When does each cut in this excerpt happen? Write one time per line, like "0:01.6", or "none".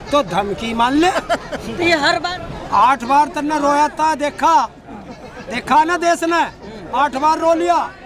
0:02.3